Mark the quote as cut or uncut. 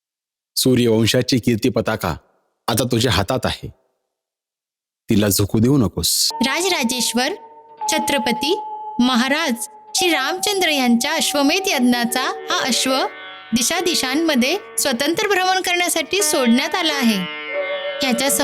cut